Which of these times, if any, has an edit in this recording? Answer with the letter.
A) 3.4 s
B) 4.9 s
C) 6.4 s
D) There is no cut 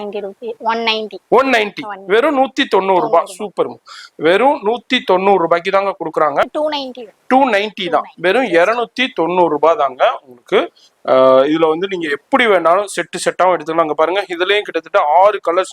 C